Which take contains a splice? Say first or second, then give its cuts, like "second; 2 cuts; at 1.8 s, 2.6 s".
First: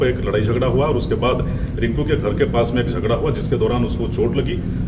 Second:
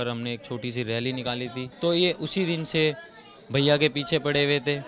second; 1 cut; at 1.7 s